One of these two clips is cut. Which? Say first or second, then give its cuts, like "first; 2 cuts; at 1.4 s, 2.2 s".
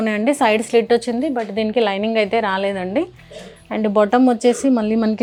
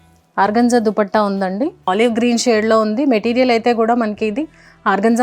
second; 1 cut; at 1.9 s